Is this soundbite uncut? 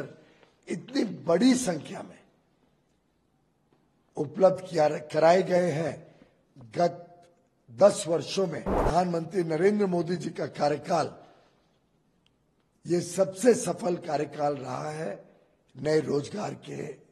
no; 1 cut; at 8.8 s

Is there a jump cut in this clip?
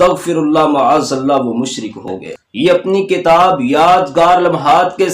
yes; 1 cut; at 2.0 s

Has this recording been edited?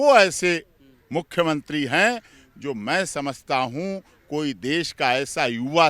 no; 0 cuts

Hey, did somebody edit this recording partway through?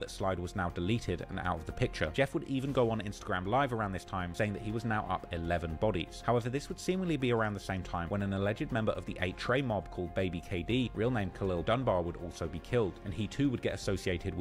no; 0 cuts

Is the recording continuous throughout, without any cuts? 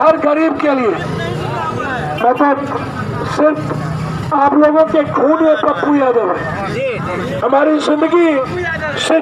yes; 0 cuts

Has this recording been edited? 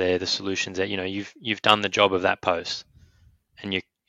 no; 0 cuts

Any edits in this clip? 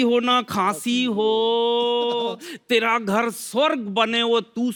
no; 0 cuts

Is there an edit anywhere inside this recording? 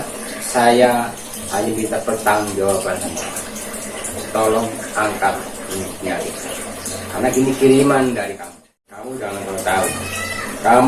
yes; 1 cut; at 8.3 s

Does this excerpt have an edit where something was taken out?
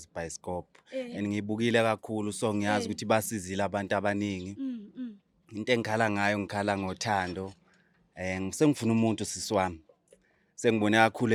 no; 0 cuts

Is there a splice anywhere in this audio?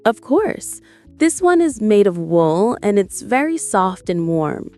no; 0 cuts

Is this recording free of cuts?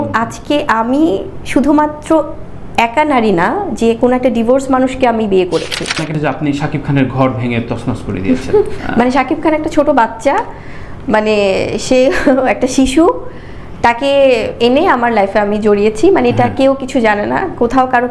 no; 2 cuts; at 6.1 s, 8.8 s

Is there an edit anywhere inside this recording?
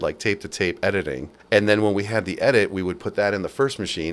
yes; 1 cut; at 1.3 s

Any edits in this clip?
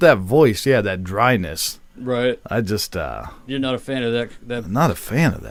no; 0 cuts

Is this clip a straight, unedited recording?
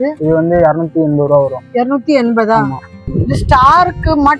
no; 1 cut; at 3.0 s

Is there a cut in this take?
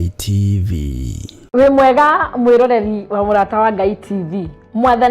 yes; 1 cut; at 1.3 s

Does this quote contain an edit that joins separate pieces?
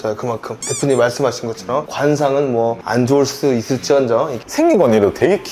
yes; 1 cut; at 4.4 s

